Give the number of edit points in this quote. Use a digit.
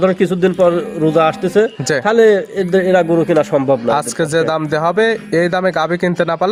0